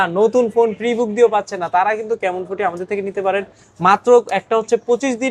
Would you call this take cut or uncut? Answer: uncut